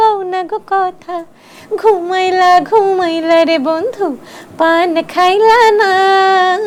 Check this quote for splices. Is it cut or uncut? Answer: uncut